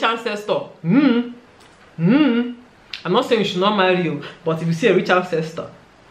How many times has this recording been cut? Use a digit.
0